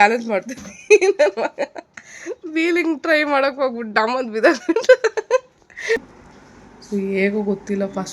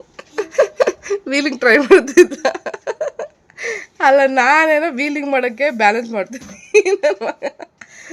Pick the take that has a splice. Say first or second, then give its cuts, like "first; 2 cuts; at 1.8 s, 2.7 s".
first; 1 cut; at 6.0 s